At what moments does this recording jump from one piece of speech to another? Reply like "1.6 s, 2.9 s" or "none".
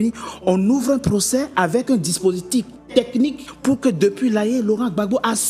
3.2 s